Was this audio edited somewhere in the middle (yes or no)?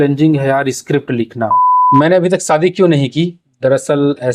yes